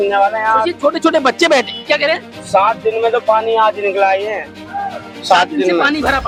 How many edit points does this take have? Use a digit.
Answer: 0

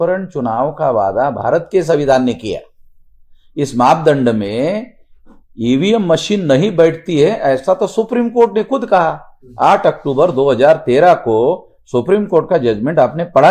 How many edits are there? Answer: 0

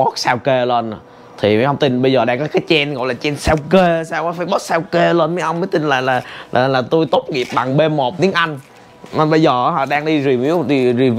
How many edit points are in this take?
0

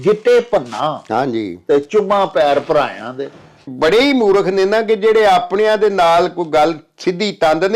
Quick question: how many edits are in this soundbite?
1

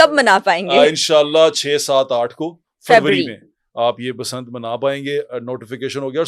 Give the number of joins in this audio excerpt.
0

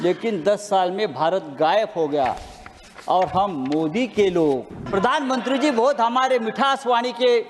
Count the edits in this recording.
1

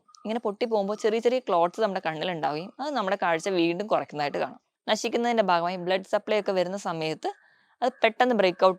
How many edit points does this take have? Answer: 1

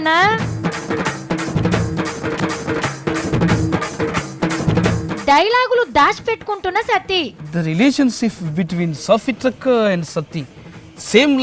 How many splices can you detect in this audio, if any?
1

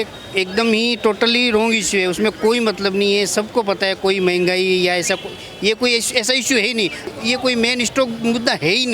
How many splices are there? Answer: 1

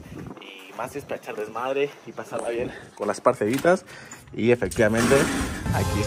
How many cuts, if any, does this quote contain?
0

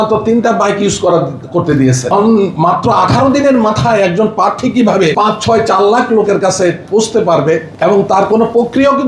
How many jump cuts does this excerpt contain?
3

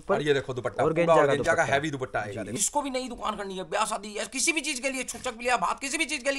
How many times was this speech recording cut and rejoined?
1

